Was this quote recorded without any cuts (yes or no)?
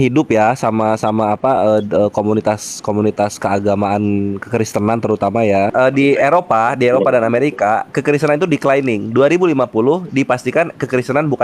no